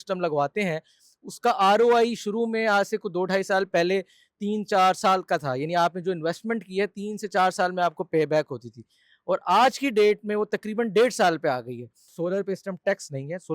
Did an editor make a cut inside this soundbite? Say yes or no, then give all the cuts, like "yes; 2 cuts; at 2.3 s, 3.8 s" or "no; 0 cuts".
yes; 1 cut; at 12.1 s